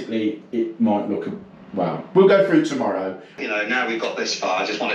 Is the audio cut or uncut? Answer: cut